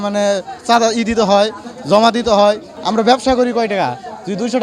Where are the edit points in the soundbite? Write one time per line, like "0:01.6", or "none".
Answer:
0:02.7